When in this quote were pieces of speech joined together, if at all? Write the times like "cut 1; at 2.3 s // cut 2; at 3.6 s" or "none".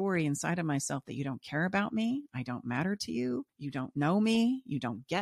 cut 1; at 3.6 s